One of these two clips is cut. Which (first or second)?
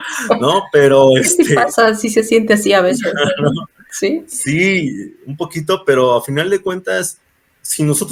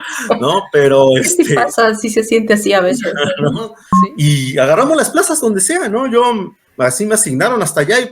second